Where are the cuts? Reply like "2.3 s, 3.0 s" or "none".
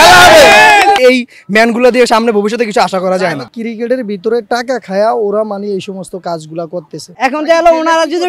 1.0 s, 3.4 s, 7.1 s